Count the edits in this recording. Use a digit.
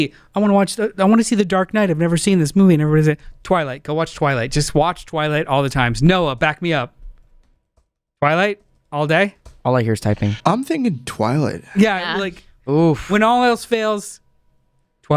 1